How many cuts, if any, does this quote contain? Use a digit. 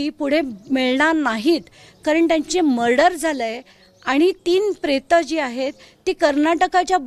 0